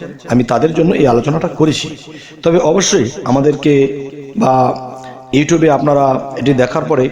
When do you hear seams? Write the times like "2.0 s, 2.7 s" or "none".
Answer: none